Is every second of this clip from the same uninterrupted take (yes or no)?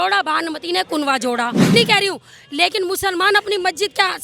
no